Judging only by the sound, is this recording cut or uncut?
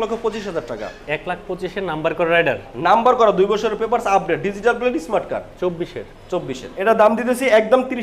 cut